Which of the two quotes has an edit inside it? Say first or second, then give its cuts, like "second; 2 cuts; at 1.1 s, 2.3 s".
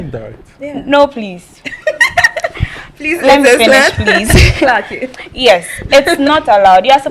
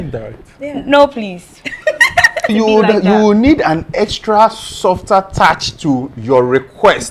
second; 1 cut; at 2.5 s